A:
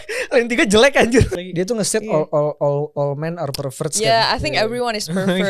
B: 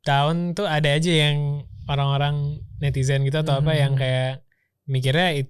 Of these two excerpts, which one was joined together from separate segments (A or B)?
A